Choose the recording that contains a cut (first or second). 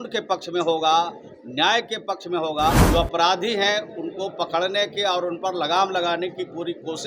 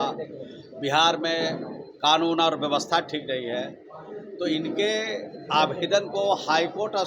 first